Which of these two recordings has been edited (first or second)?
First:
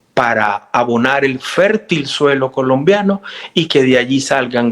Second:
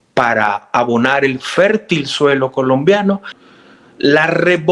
second